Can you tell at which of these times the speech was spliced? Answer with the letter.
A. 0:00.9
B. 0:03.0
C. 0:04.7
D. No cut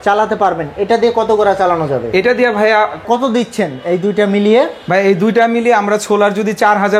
B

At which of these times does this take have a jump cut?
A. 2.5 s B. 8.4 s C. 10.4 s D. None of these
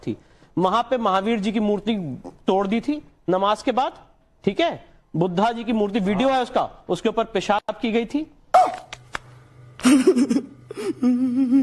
D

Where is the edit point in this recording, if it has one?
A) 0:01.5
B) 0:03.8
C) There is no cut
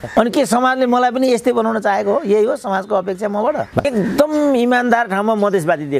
B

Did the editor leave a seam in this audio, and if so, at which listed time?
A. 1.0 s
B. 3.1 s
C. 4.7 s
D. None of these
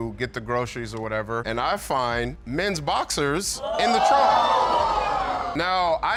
D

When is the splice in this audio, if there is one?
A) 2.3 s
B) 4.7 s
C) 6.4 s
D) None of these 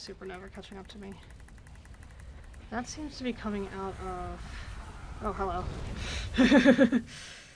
D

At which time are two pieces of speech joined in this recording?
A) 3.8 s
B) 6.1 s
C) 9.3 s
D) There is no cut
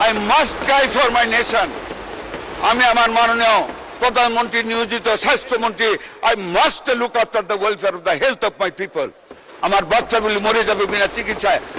D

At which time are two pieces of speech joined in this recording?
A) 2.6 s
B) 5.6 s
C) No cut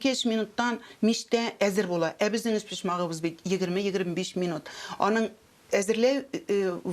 C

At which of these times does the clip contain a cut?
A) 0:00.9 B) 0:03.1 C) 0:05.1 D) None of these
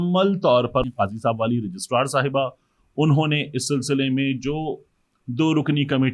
A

